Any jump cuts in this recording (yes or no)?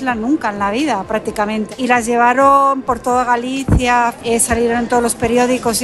yes